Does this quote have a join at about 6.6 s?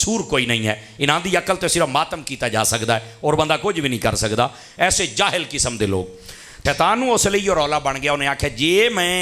yes; 1 cut; at 6.6 s

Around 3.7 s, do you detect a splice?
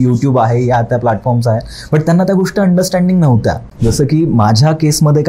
yes; 1 cut; at 3.7 s

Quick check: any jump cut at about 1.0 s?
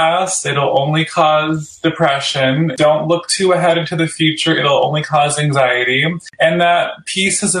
no; 2 cuts; at 2.7 s, 6.2 s

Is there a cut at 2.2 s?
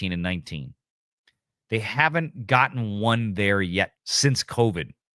no; 1 cut; at 4.0 s

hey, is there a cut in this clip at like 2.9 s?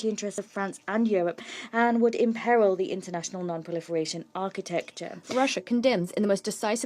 no; 1 cut; at 5.2 s

